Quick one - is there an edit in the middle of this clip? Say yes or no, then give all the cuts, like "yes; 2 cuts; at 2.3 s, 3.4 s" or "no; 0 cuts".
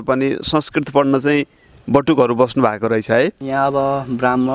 yes; 1 cut; at 3.4 s